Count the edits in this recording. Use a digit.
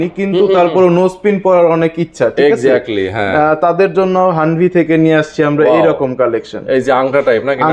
0